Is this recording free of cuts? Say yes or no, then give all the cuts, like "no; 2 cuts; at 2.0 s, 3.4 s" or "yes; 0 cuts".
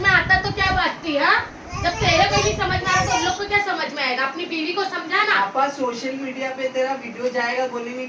yes; 0 cuts